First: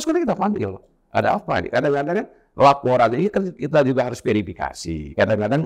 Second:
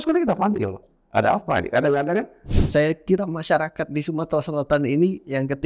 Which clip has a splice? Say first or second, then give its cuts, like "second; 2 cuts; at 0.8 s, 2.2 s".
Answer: second; 1 cut; at 2.4 s